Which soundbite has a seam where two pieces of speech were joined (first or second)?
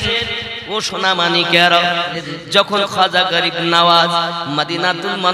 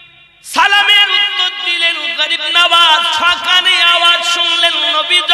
first